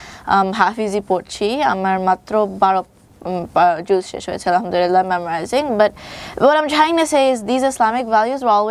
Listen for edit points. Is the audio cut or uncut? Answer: uncut